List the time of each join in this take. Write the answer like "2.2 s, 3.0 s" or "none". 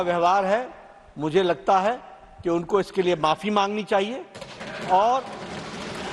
none